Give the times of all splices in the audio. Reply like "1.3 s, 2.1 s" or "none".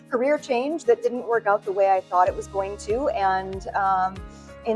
none